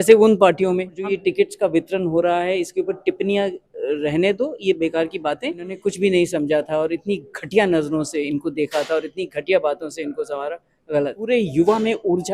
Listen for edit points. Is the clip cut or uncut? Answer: cut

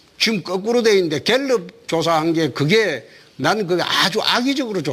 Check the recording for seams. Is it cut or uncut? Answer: cut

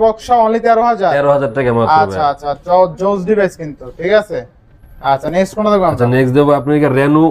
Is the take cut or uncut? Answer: uncut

